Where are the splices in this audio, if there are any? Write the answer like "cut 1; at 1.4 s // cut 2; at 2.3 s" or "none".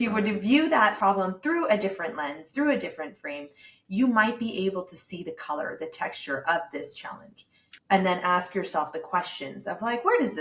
cut 1; at 1.0 s